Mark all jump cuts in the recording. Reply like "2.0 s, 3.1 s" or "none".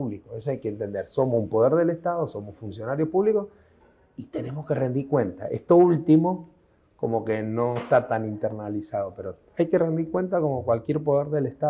none